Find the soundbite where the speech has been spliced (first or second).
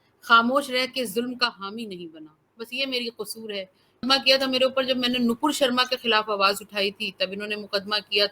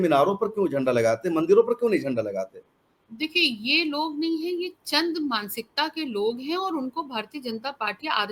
first